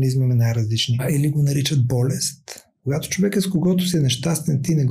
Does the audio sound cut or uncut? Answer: cut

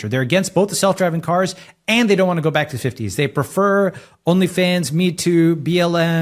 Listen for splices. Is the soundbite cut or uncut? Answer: uncut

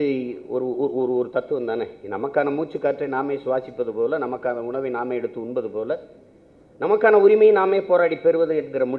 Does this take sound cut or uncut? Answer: uncut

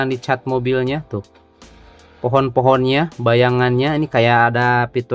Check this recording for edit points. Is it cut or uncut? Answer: uncut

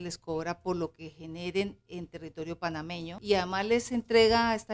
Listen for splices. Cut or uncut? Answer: cut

